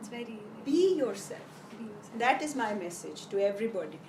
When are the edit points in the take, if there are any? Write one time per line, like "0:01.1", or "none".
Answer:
none